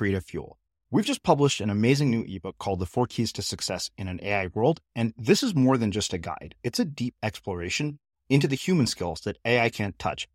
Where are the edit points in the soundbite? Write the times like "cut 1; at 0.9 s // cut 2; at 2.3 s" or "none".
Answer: none